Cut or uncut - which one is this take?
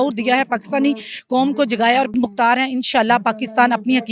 cut